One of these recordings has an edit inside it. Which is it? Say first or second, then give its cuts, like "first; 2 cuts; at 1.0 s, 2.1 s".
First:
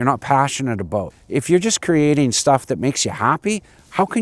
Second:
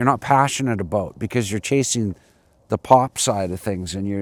first; 1 cut; at 1.2 s